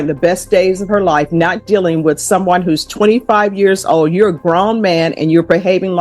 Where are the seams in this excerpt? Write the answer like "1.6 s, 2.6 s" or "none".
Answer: none